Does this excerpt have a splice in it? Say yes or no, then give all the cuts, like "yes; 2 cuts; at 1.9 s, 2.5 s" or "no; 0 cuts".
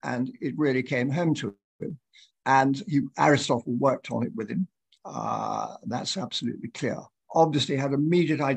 yes; 1 cut; at 7.2 s